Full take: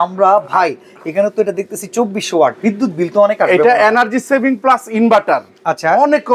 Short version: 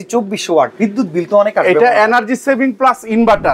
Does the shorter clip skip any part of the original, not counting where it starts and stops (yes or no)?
no